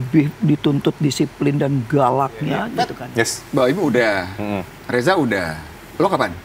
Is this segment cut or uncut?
cut